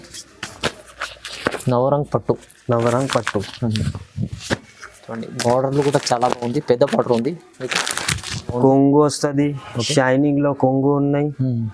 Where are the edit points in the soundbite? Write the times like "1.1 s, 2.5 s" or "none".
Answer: 8.5 s